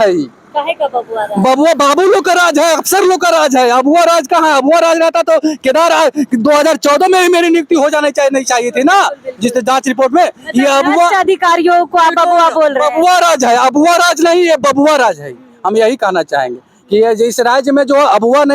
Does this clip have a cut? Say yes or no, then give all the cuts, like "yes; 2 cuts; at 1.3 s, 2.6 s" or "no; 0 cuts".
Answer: no; 0 cuts